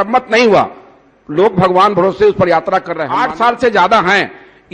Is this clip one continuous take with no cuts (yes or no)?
no